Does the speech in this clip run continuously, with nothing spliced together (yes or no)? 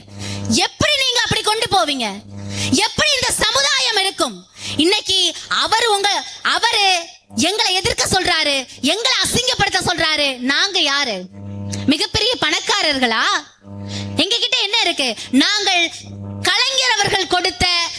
yes